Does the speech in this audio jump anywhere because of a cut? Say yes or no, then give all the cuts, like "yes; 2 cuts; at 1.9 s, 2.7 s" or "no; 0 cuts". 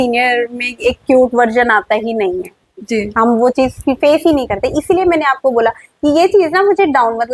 no; 0 cuts